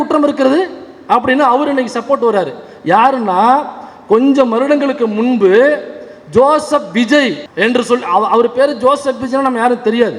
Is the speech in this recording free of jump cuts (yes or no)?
yes